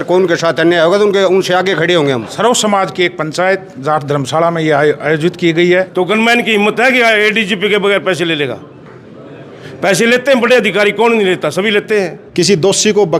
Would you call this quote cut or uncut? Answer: cut